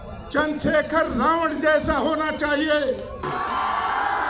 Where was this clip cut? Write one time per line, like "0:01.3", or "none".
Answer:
0:03.2